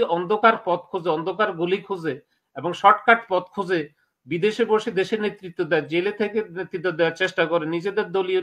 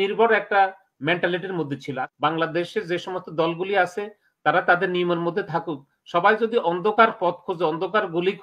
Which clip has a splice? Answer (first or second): second